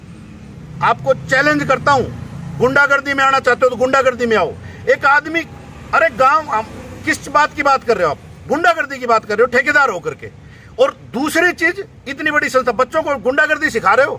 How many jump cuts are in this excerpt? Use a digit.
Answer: 0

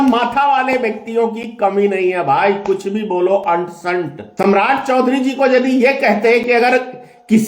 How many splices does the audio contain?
1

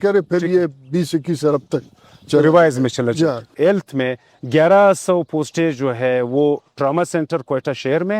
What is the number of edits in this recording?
1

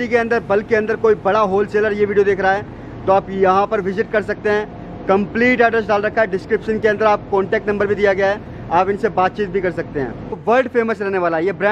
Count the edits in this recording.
1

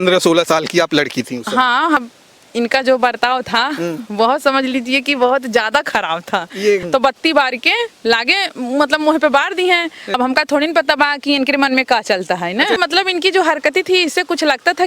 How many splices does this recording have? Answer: 4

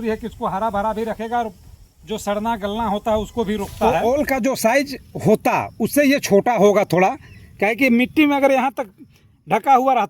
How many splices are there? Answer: 1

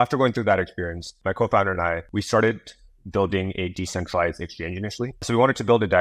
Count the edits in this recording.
3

